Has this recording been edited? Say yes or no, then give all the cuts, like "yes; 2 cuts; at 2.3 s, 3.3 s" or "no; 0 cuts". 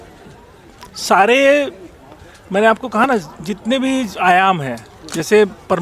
no; 0 cuts